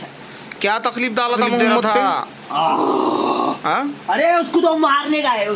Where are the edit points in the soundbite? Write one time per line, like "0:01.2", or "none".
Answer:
0:01.8